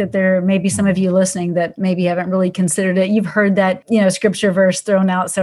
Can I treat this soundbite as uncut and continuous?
no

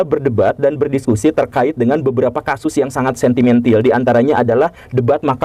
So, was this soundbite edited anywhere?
no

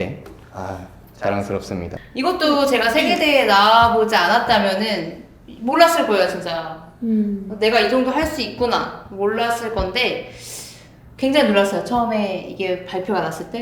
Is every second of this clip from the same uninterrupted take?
yes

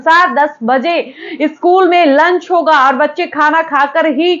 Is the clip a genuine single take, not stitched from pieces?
yes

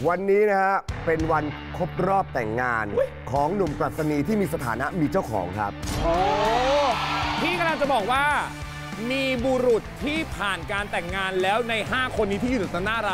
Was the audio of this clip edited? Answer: no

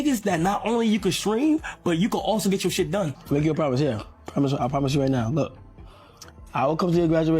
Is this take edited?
yes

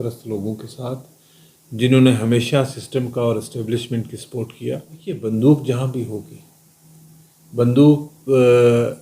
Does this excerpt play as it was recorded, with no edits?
no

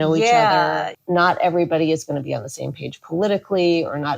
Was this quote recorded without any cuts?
no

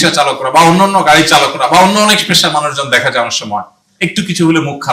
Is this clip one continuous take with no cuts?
yes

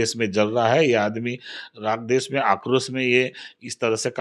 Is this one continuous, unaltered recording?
yes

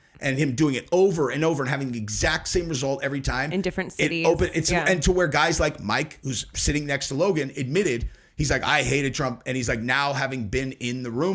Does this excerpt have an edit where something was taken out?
no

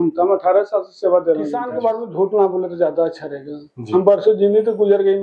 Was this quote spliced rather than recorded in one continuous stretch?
yes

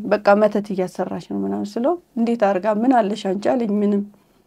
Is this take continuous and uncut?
yes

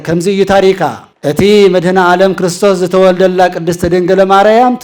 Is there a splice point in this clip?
yes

